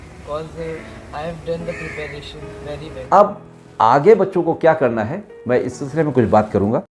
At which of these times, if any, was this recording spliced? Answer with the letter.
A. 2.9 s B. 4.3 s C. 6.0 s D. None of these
A